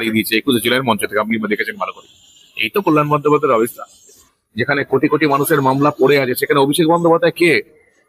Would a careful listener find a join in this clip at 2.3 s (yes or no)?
no